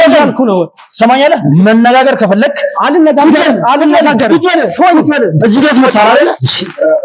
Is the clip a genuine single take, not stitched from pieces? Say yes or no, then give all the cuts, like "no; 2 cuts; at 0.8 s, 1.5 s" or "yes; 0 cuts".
yes; 0 cuts